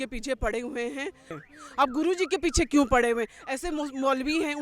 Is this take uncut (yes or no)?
no